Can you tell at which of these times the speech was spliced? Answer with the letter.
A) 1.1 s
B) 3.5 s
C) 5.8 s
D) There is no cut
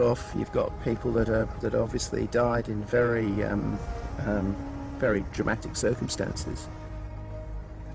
B